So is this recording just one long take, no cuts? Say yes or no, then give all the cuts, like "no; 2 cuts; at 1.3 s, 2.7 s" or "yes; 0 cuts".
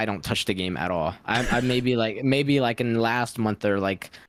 yes; 0 cuts